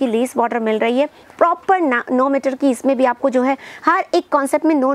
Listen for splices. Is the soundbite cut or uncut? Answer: uncut